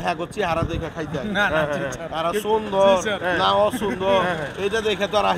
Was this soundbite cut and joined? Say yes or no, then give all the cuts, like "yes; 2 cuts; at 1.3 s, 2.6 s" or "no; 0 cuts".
no; 0 cuts